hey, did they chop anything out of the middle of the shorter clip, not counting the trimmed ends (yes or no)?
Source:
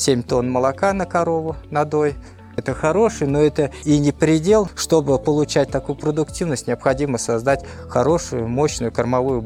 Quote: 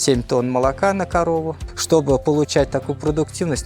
yes